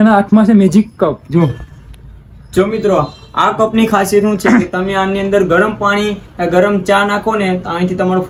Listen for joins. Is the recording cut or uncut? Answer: uncut